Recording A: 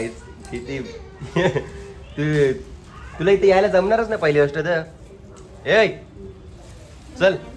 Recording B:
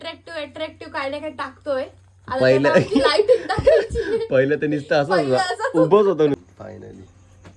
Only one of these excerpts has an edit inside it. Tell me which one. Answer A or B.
B